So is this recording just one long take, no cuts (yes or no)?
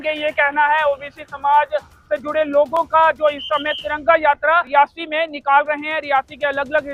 yes